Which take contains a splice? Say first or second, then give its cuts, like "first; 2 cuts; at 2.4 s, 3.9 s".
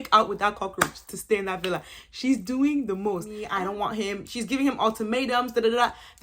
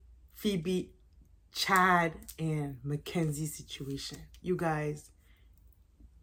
first; 1 cut; at 3.4 s